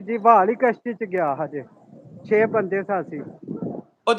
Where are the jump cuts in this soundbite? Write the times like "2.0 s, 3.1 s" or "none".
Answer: none